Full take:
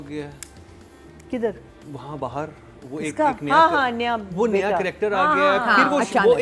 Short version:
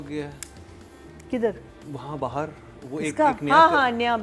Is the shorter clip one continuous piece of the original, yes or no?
yes